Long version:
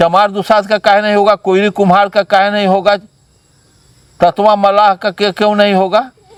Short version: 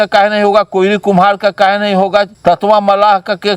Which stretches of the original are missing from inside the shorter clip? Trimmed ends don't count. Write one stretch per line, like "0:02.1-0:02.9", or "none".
0:03.1-0:04.1